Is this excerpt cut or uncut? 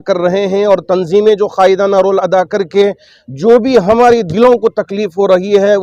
uncut